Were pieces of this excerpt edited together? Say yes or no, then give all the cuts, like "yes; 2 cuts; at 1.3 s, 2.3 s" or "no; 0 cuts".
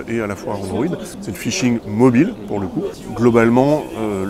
yes; 2 cuts; at 1.1 s, 3.0 s